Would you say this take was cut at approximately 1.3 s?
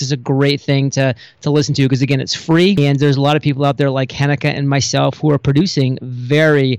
no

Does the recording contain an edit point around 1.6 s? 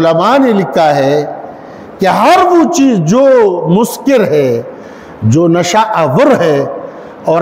no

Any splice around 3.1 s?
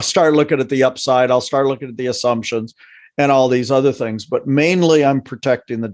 no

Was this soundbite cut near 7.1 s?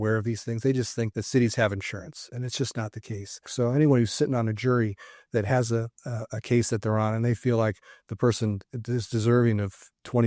no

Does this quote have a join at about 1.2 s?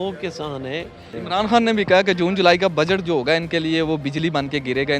yes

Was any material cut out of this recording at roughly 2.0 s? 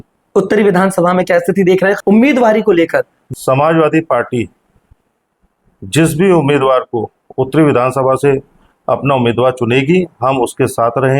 yes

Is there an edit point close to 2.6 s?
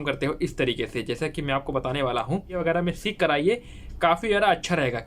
yes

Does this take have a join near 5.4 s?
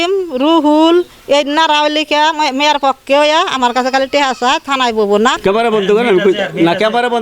yes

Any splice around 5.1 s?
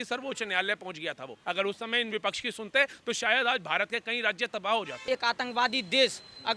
yes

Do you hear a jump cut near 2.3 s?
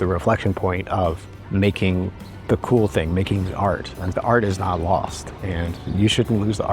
yes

